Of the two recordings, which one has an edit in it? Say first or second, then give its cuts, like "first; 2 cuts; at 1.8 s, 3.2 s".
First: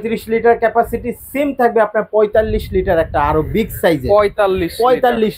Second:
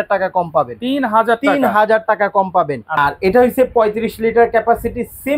second; 1 cut; at 3.0 s